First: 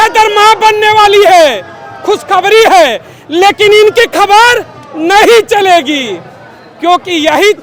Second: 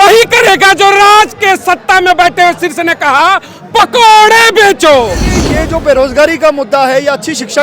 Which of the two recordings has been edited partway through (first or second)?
second